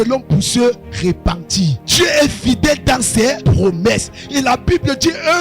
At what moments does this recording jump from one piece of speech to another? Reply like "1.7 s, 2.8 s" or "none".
1.8 s, 3.4 s